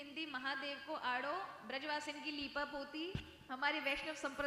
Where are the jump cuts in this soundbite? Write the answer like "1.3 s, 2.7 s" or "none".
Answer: 3.4 s